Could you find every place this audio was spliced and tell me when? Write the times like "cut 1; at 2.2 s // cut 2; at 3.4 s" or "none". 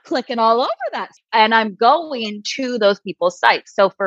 cut 1; at 1.2 s